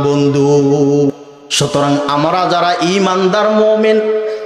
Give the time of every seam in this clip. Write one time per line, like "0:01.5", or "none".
0:01.1